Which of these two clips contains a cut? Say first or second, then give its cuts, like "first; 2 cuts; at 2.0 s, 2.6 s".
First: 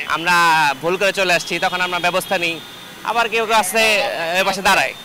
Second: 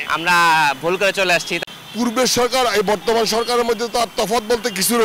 second; 1 cut; at 1.5 s